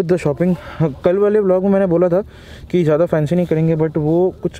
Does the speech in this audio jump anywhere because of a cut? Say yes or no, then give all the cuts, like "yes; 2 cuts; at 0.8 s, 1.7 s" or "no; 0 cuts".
no; 0 cuts